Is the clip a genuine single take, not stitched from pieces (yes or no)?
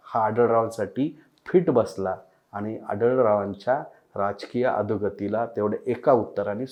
yes